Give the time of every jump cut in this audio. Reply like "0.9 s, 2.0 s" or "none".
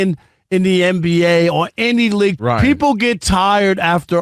2.4 s